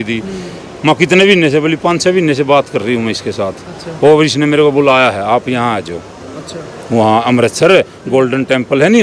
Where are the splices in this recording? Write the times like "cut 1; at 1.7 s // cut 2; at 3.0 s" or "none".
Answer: none